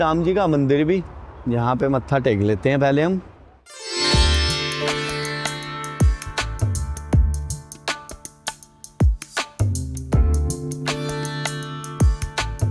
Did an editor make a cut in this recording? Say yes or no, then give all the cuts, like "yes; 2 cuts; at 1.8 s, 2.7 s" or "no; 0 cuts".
no; 0 cuts